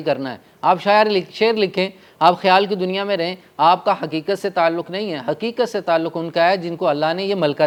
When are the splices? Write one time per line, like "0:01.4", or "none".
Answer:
none